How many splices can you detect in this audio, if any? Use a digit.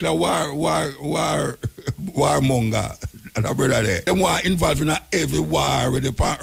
1